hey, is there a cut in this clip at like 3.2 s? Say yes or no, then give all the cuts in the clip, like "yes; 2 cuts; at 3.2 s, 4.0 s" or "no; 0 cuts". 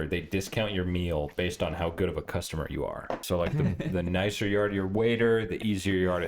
yes; 1 cut; at 3.2 s